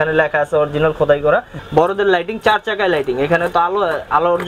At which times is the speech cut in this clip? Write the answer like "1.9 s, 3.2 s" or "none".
1.6 s